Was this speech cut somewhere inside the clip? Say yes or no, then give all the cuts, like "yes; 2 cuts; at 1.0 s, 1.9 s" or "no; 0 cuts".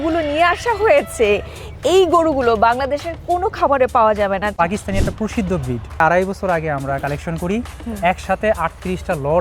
yes; 2 cuts; at 4.5 s, 6.0 s